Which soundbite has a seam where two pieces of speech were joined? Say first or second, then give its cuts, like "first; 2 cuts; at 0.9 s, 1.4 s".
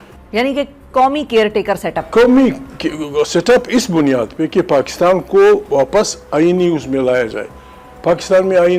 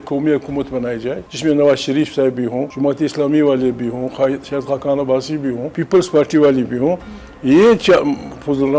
second; 3 cuts; at 1.2 s, 2.7 s, 5.7 s